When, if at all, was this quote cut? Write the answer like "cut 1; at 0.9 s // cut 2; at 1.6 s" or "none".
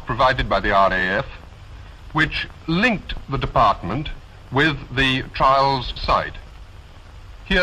cut 1; at 5.6 s